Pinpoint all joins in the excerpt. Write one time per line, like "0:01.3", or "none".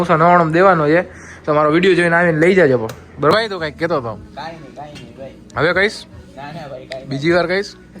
0:03.3